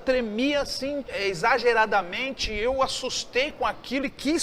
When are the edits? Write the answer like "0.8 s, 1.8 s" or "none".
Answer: 1.1 s